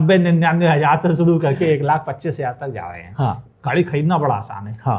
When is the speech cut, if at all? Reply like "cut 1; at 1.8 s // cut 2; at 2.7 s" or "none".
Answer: cut 1; at 3.4 s